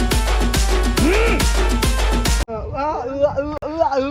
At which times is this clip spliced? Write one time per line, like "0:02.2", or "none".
0:01.0
0:02.4